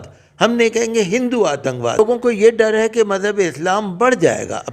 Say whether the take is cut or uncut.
cut